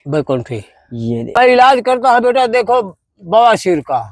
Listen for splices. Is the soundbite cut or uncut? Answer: cut